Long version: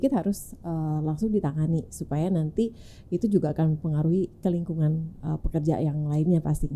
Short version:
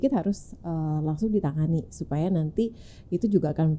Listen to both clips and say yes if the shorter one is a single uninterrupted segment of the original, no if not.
yes